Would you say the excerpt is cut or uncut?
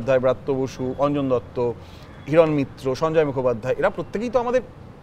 uncut